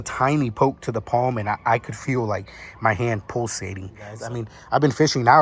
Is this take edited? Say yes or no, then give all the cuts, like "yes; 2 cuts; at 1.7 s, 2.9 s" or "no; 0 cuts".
yes; 1 cut; at 4.1 s